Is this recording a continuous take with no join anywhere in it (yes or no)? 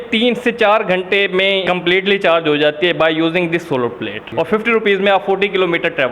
no